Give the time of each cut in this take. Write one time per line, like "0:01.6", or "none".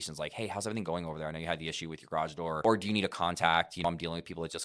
0:02.6
0:03.8